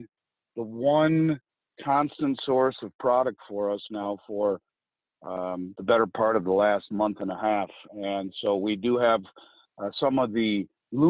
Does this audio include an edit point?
no; 0 cuts

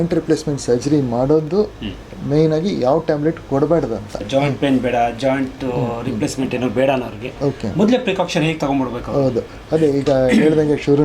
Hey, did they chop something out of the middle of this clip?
yes; 1 cut; at 4.2 s

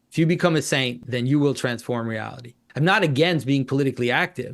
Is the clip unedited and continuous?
no; 2 cuts; at 1.0 s, 2.6 s

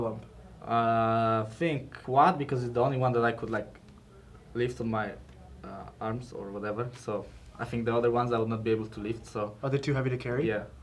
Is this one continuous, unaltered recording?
no; 1 cut; at 1.9 s

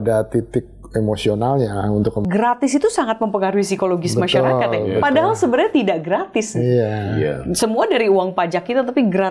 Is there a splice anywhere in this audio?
yes; 1 cut; at 2.2 s

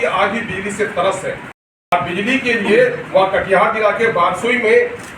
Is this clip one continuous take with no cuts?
no; 1 cut; at 1.6 s

